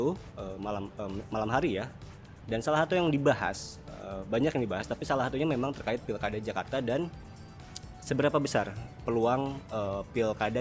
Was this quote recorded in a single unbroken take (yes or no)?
yes